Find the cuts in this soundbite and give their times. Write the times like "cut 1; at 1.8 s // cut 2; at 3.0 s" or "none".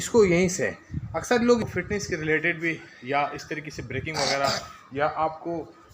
cut 1; at 1.6 s